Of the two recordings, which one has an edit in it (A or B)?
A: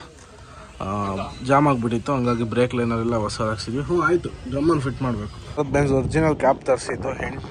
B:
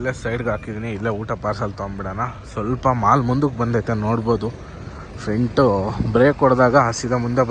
A